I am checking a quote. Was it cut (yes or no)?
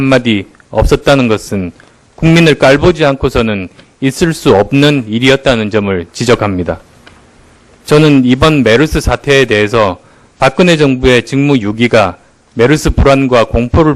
no